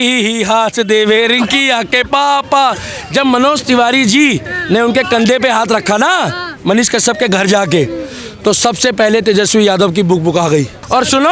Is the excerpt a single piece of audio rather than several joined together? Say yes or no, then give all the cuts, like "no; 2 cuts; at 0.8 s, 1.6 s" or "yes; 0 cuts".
yes; 0 cuts